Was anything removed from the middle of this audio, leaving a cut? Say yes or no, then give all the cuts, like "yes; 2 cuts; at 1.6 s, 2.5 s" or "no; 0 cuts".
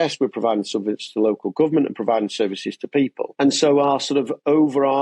yes; 1 cut; at 3.2 s